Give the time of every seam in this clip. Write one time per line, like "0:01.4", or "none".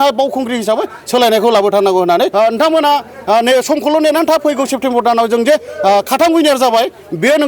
0:02.3